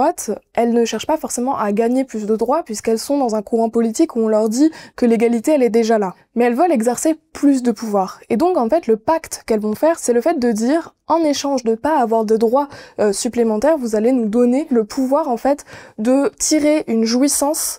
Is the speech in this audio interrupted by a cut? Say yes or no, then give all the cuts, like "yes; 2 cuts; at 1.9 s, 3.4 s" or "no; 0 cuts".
yes; 3 cuts; at 6.2 s, 10.0 s, 14.7 s